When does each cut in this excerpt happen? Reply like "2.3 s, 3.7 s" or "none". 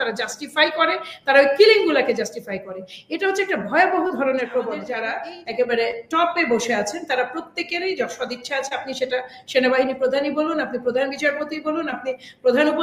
5.0 s